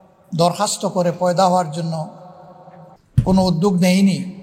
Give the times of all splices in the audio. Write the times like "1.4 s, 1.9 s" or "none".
3.0 s